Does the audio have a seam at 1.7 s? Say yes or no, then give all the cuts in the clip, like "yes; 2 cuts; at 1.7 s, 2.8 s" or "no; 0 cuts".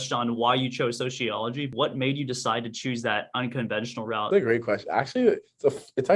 yes; 2 cuts; at 1.7 s, 4.2 s